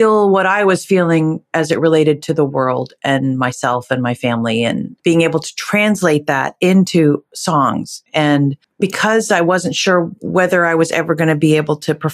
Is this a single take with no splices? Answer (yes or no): no